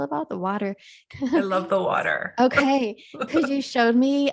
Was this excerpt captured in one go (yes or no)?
no